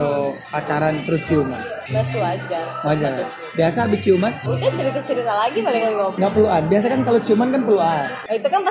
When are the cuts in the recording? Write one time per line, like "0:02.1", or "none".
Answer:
none